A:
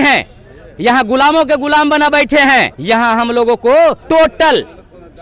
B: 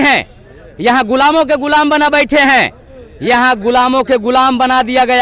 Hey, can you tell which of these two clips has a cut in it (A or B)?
A